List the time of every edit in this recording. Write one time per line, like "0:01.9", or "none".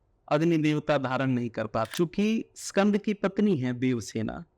0:01.9